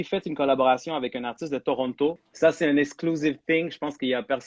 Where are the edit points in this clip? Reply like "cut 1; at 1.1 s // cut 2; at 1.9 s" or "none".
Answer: cut 1; at 2.3 s